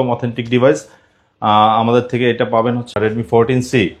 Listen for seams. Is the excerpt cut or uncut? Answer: cut